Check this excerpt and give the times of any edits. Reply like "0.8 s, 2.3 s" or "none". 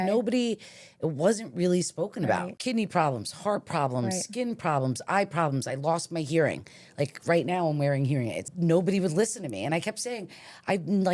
2.5 s, 8.4 s